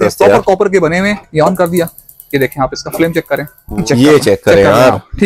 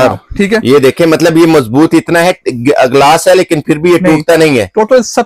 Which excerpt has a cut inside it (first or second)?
first